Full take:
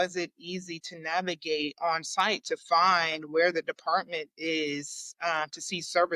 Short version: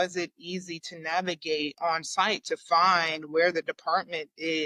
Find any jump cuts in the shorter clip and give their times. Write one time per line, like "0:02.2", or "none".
none